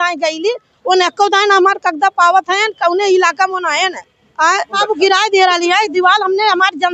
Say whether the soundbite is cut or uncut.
uncut